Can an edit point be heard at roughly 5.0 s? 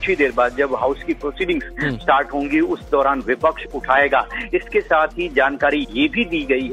no; 1 cut; at 2.7 s

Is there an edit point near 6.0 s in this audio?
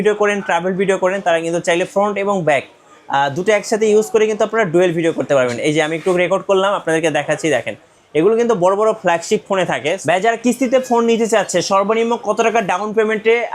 no; 1 cut; at 10.0 s

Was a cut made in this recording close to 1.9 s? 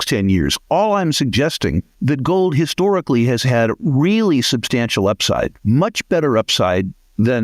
yes; 2 cuts; at 1.9 s, 5.6 s

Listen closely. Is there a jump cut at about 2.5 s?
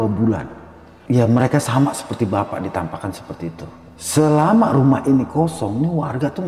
no; 1 cut; at 3.7 s

